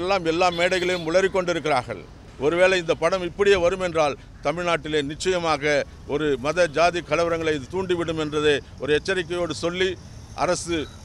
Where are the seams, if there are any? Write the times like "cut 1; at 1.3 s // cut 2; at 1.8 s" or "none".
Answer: cut 1; at 2.3 s